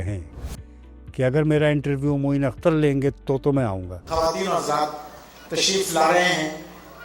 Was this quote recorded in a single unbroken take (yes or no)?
no